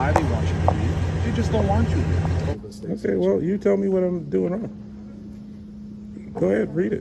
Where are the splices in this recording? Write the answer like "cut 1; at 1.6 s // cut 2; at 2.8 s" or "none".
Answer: cut 1; at 2.5 s